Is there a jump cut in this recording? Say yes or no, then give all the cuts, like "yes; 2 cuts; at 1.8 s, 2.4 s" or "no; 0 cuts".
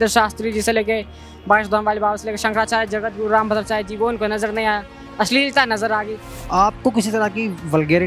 yes; 1 cut; at 6.3 s